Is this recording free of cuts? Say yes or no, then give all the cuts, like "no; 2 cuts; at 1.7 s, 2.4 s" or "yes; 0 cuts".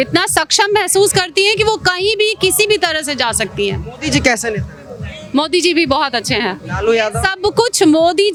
yes; 0 cuts